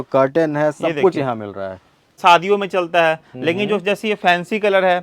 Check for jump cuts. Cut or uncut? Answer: cut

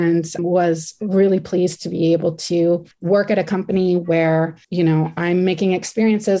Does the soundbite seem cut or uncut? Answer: cut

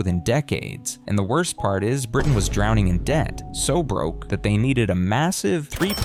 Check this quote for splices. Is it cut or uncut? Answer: uncut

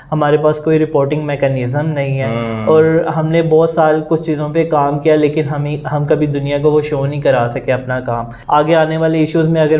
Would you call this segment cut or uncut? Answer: cut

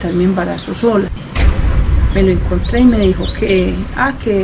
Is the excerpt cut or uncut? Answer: cut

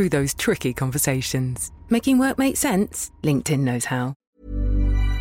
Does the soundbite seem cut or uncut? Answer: cut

